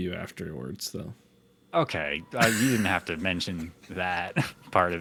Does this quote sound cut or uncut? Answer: uncut